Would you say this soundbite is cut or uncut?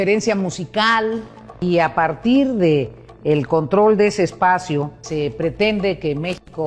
cut